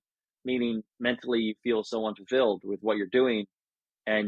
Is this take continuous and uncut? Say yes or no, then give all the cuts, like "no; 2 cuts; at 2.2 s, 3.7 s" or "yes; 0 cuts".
yes; 0 cuts